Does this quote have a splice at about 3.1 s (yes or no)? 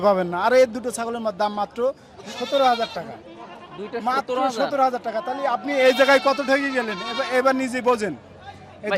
no